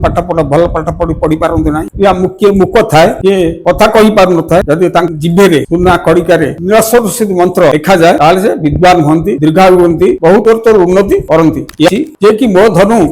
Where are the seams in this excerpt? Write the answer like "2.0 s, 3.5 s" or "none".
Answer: 11.9 s